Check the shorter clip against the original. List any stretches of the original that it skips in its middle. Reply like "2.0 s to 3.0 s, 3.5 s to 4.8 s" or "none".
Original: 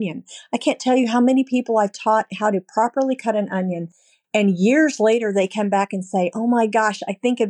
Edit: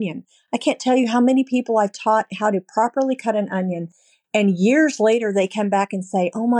none